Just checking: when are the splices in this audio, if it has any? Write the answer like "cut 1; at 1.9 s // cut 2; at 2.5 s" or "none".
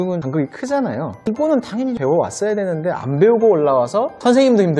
cut 1; at 1.3 s